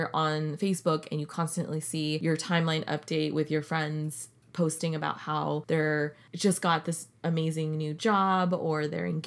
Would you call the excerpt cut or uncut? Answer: cut